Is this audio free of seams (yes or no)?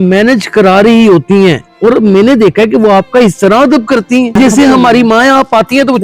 no